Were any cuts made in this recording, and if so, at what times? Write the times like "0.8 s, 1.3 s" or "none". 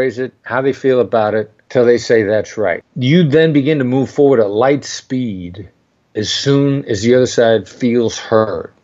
1.6 s, 2.9 s